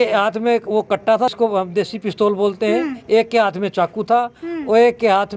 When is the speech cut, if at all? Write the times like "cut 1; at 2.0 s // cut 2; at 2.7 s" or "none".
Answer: cut 1; at 1.3 s